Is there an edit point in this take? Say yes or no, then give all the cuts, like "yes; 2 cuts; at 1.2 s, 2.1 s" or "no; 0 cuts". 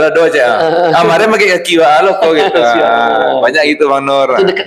no; 0 cuts